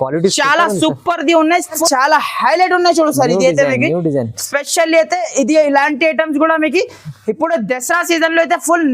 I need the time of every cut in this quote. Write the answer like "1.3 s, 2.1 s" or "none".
1.8 s